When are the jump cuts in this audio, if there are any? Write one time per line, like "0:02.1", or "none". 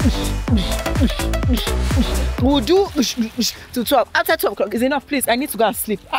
none